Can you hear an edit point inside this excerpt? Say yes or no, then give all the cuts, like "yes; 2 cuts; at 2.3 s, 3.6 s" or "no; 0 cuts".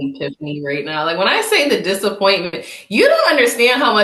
no; 0 cuts